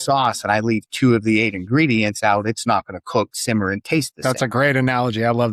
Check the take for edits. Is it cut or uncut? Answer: uncut